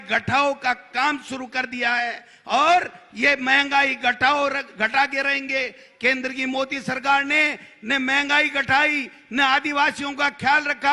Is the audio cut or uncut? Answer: uncut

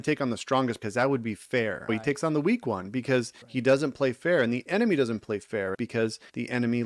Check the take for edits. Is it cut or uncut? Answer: cut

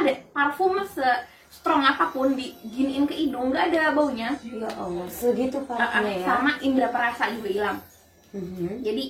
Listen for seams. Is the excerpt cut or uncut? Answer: uncut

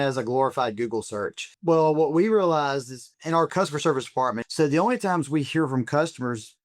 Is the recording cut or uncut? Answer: cut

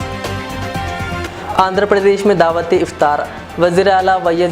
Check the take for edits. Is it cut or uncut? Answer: cut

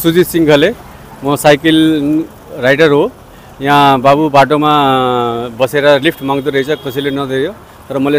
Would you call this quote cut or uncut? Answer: uncut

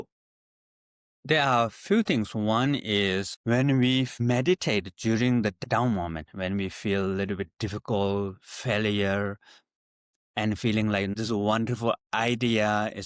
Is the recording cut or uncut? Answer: cut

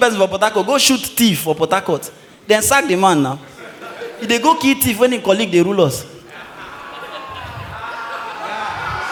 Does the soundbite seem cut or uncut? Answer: uncut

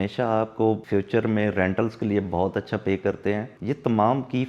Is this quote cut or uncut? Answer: cut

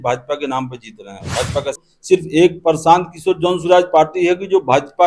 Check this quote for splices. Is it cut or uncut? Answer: cut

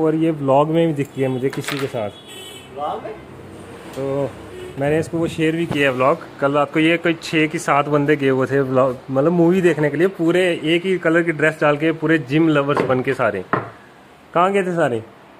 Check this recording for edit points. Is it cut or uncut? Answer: uncut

